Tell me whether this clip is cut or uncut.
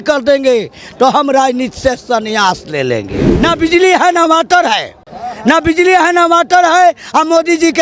cut